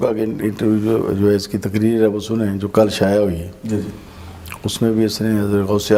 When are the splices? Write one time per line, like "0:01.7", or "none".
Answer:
none